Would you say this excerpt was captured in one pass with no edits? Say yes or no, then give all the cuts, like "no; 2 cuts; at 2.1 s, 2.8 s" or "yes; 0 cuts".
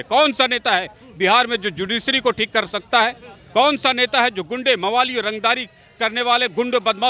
yes; 0 cuts